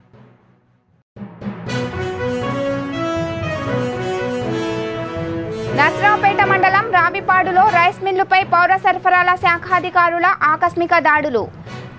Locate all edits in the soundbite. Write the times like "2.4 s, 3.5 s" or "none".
5.7 s